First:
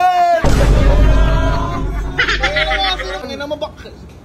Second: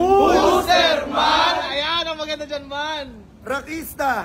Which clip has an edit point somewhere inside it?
first; 1 cut; at 3.2 s

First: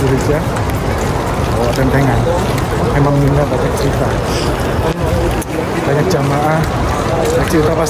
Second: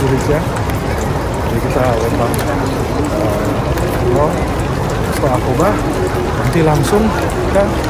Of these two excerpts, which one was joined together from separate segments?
first; 1 cut; at 1.2 s

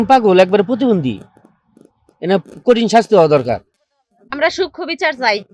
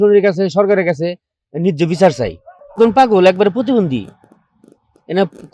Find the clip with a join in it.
first; 1 cut; at 3.6 s

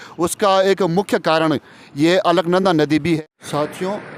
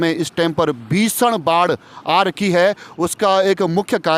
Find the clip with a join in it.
first; 1 cut; at 3.2 s

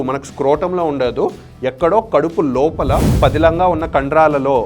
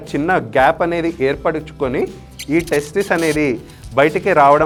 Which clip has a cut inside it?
first; 1 cut; at 3.1 s

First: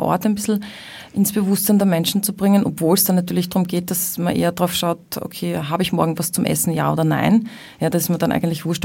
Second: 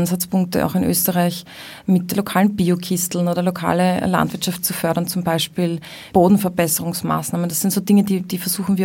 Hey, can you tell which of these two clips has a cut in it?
second; 2 cuts; at 2.1 s, 6.0 s

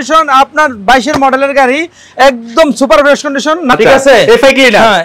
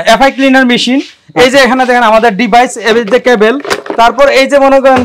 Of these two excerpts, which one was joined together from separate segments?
first; 1 cut; at 3.7 s

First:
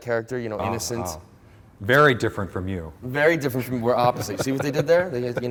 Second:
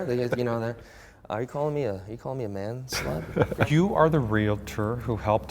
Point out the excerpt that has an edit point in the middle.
second; 1 cut; at 3.7 s

